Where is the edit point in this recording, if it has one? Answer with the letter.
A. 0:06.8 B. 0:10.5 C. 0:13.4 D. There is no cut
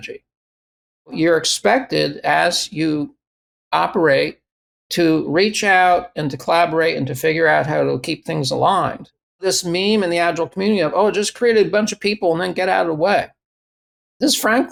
D